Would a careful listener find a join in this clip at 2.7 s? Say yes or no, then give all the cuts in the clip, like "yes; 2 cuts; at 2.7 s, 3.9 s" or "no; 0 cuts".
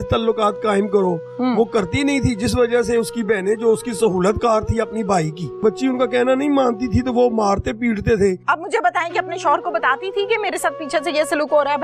no; 2 cuts; at 5.6 s, 8.4 s